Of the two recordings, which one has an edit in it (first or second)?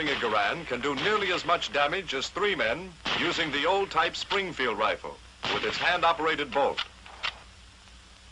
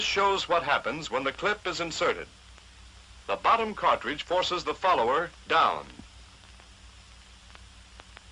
second